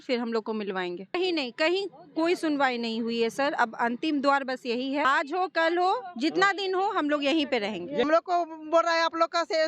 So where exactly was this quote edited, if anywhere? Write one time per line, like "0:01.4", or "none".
0:01.2
0:05.0
0:08.0